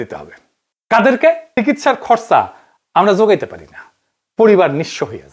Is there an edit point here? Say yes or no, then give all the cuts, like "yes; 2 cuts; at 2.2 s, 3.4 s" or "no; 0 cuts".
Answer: yes; 1 cut; at 1.5 s